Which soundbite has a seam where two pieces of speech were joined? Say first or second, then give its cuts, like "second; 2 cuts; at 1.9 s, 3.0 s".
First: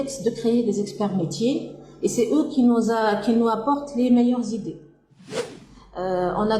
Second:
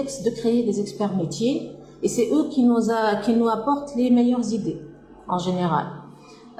first; 1 cut; at 5.2 s